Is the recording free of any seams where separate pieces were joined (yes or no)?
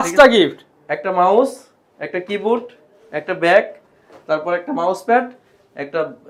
yes